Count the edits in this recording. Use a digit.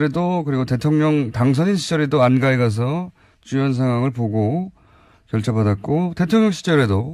1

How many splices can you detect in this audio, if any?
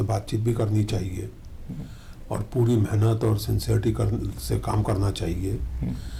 0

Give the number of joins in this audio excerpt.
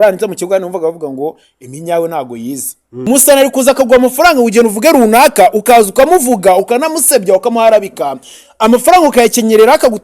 1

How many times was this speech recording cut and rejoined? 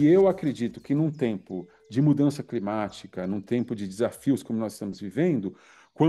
0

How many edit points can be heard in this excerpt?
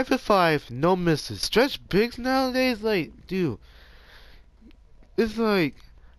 1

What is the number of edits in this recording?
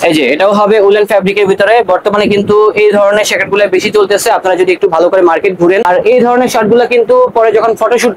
1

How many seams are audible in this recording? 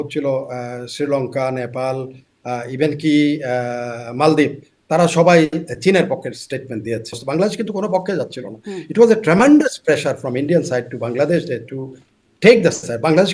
1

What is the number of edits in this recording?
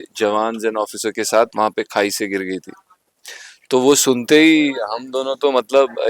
0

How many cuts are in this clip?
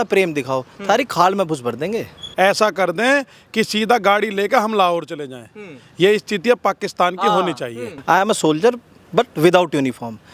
2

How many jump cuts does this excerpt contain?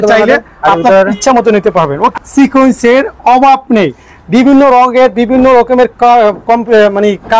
1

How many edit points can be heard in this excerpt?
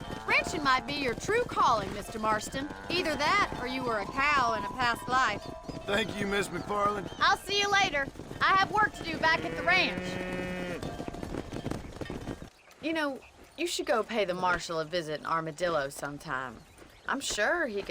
1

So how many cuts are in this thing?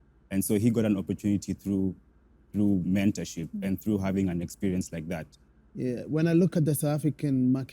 1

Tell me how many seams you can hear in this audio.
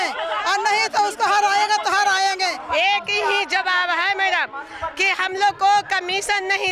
1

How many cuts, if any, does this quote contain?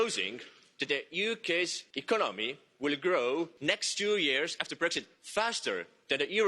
2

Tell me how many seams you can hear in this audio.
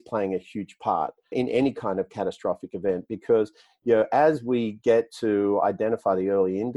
1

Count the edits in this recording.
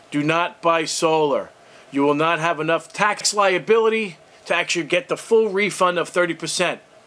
1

